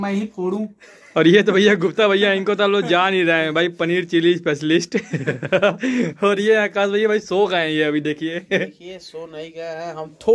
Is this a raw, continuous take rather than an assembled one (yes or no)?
yes